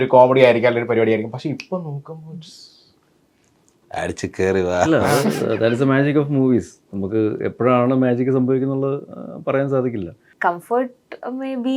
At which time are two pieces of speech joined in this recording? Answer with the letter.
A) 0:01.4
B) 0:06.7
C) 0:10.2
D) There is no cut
C